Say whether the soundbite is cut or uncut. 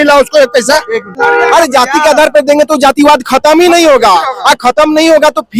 cut